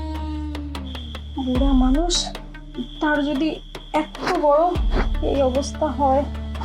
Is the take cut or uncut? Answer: uncut